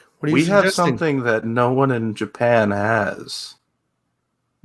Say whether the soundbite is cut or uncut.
uncut